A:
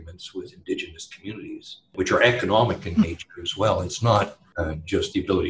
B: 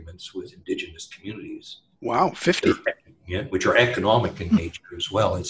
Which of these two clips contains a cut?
A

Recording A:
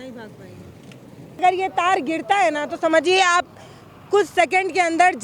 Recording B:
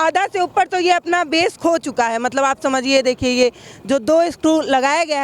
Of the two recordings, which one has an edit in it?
A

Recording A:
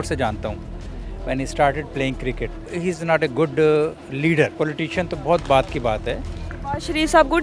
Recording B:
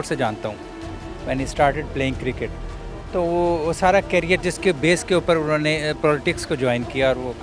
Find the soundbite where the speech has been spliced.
A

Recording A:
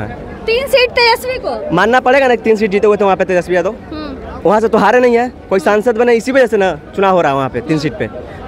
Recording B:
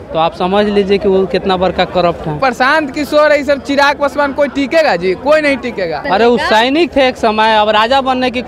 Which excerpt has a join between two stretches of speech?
B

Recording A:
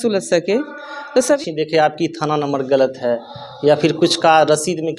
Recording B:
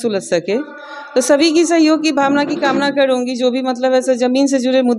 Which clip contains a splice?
A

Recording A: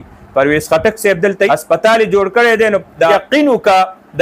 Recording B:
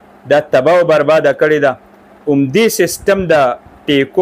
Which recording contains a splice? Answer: A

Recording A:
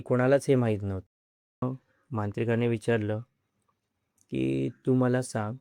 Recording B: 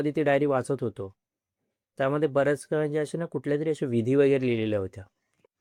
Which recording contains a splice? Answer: A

